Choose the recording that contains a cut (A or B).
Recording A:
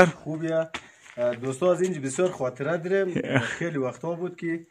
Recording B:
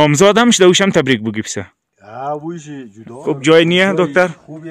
B